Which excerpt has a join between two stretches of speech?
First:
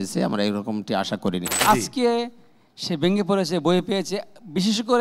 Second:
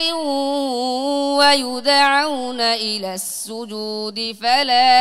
first; 1 cut; at 1.5 s

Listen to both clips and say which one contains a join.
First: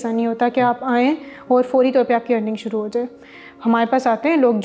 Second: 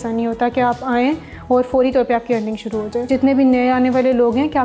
second; 1 cut; at 3.1 s

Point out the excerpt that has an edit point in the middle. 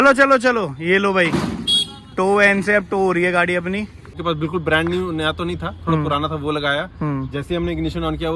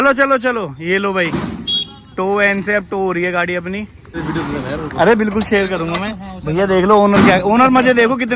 first; 1 cut; at 4.2 s

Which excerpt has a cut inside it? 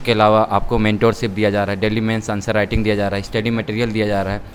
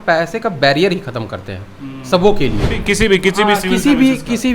second; 1 cut; at 2.8 s

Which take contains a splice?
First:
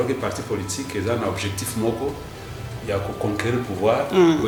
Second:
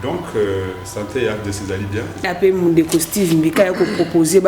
second; 1 cut; at 2.2 s

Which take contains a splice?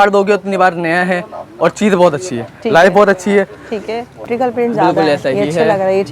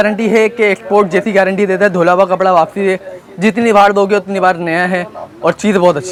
first; 1 cut; at 4.2 s

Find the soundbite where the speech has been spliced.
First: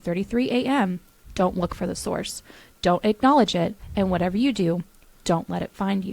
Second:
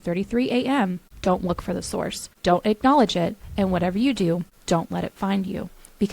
second; 3 cuts; at 1.1 s, 2.2 s, 4.5 s

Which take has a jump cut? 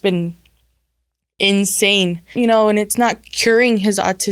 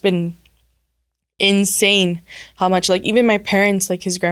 first; 1 cut; at 2.3 s

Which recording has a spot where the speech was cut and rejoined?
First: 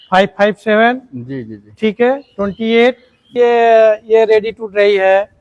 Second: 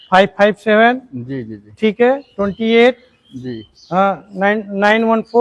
first; 1 cut; at 3.3 s

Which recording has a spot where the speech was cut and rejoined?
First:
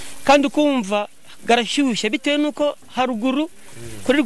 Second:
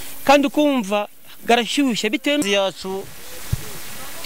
second; 1 cut; at 2.4 s

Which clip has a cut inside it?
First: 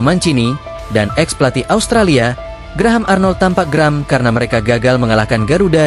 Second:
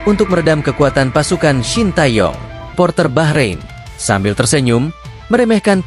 second; 1 cut; at 2.8 s

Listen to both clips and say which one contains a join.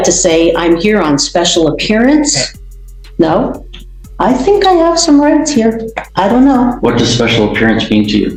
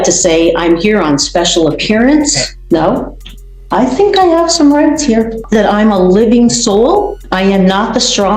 second; 3 cuts; at 2.5 s, 5.4 s, 7.2 s

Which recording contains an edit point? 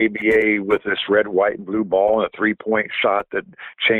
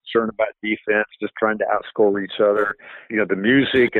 second; 1 cut; at 3.1 s

